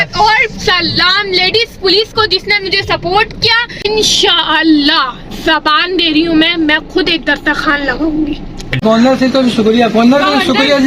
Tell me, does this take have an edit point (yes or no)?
yes